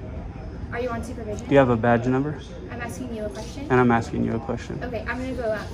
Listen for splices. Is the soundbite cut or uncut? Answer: uncut